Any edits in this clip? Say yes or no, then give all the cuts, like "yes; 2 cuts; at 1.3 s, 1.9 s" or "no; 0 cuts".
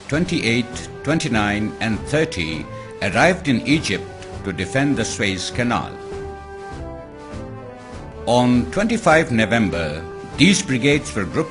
yes; 1 cut; at 6.4 s